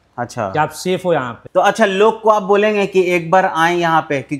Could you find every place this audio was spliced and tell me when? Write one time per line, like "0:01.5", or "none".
0:01.4